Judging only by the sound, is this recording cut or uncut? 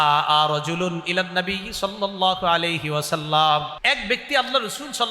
cut